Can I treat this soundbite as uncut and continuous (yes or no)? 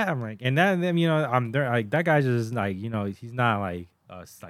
yes